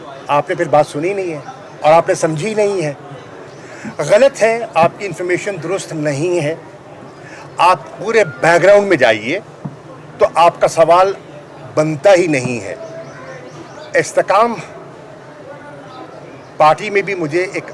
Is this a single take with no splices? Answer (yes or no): no